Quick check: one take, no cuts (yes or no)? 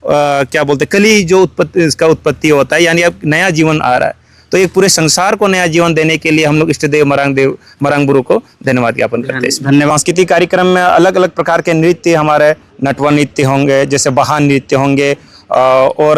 no